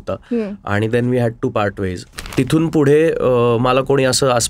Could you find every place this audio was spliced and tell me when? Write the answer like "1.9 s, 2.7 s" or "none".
2.1 s

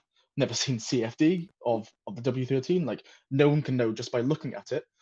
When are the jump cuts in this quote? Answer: none

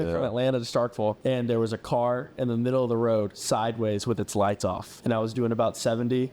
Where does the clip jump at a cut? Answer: 1.2 s, 4.9 s

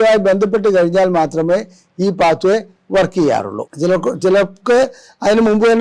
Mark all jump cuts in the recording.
none

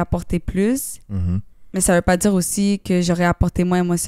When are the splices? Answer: 1.6 s

